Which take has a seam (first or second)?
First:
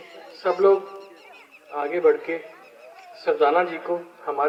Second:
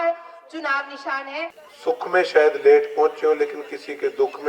second